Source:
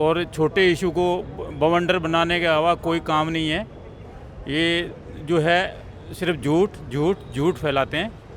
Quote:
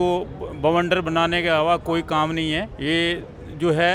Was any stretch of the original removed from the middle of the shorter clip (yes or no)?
yes